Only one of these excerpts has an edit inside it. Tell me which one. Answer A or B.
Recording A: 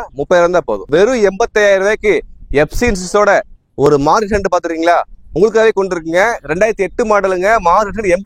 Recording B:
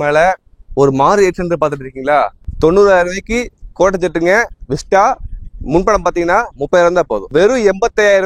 B